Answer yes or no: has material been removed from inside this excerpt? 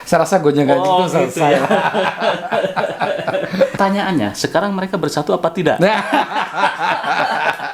yes